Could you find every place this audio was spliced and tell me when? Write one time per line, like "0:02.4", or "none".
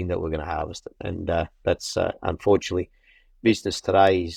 none